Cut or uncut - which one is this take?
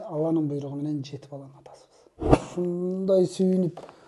cut